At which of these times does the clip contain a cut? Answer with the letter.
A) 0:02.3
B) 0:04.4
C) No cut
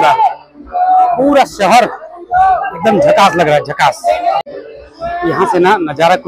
B